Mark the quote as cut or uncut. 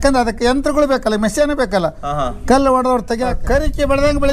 cut